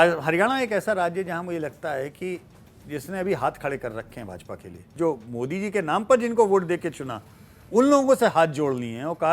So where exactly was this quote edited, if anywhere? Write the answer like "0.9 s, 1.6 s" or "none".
4.9 s